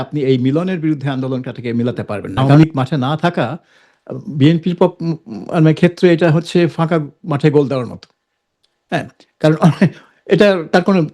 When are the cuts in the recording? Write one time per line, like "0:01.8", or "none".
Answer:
0:02.4